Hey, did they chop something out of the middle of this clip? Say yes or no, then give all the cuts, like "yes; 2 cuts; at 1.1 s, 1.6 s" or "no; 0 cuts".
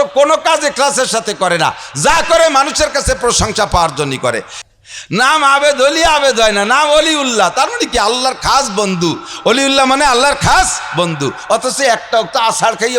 yes; 1 cut; at 4.5 s